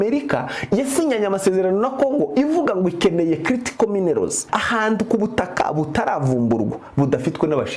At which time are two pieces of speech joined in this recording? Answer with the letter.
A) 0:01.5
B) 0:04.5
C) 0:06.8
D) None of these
B